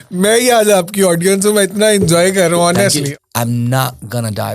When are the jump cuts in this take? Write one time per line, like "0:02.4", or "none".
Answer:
0:03.1